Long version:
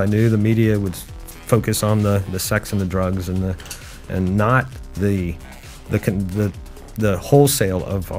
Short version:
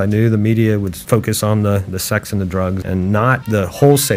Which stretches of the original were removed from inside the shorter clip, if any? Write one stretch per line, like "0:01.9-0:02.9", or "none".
0:01.0-0:01.4
0:03.2-0:04.1
0:04.7-0:06.9